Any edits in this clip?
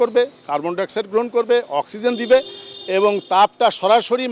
no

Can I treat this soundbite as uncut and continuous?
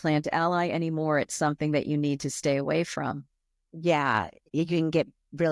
no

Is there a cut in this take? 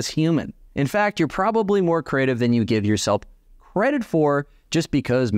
no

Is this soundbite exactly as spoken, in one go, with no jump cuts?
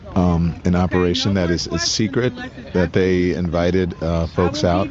yes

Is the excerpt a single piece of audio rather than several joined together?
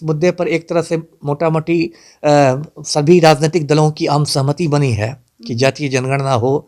yes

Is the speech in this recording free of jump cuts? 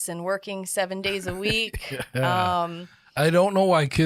yes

